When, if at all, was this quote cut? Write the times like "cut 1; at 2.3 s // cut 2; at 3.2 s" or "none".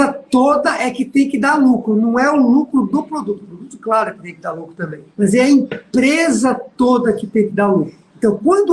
none